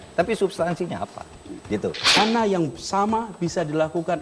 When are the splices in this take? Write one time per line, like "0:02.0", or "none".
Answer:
0:02.2